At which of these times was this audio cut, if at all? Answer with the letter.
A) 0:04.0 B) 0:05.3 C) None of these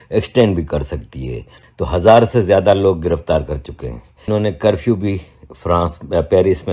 C